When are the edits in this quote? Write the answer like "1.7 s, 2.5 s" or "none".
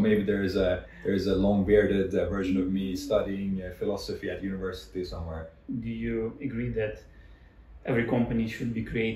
5.6 s